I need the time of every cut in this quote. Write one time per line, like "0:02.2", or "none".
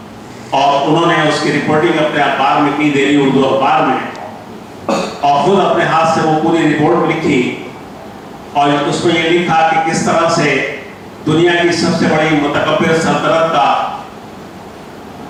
none